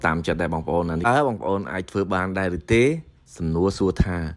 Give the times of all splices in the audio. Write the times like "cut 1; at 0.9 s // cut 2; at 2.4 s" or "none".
cut 1; at 1.1 s